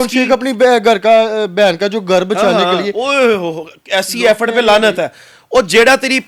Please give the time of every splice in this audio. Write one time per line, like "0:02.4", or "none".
none